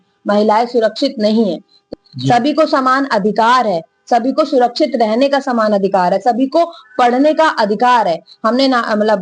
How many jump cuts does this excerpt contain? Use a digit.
1